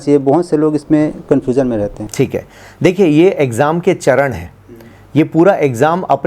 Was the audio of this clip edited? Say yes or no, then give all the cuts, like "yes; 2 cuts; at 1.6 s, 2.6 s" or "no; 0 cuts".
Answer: no; 0 cuts